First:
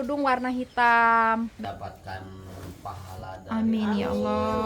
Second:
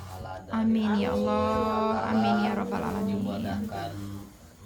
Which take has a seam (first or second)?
first